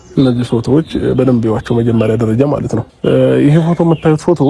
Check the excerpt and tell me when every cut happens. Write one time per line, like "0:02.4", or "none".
0:02.9